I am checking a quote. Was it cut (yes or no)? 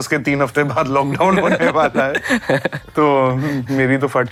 no